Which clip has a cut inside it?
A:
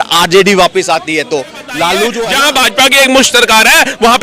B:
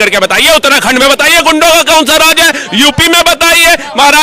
A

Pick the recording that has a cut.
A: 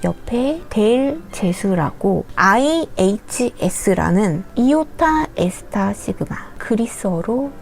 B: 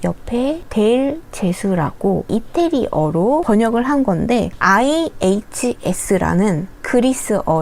A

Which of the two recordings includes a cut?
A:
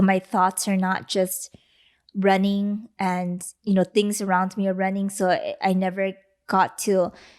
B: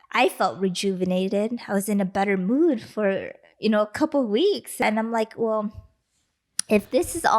B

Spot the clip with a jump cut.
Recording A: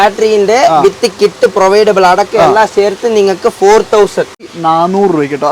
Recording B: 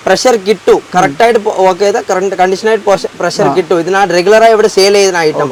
A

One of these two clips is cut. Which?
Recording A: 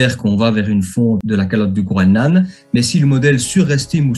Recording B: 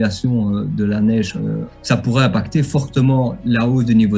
B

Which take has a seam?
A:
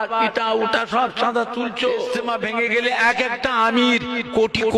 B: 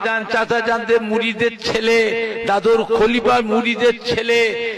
A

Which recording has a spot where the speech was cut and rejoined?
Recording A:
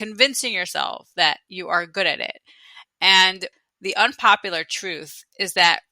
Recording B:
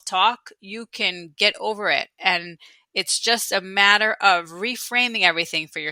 A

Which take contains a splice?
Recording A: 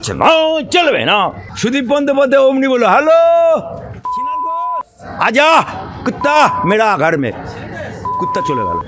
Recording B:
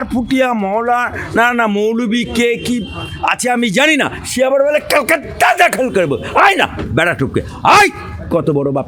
A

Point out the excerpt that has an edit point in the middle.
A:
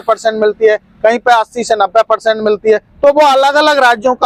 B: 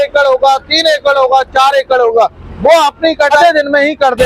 B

